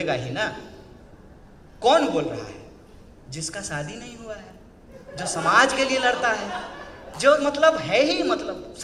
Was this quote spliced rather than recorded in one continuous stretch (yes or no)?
no